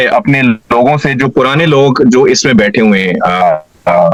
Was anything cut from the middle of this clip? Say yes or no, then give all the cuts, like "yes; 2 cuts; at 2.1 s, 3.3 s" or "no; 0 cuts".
no; 0 cuts